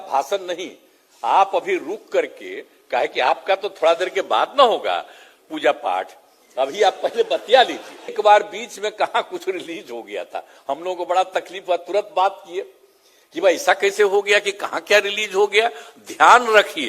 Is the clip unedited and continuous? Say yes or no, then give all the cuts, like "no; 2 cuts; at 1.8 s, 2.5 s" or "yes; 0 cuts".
no; 1 cut; at 8.1 s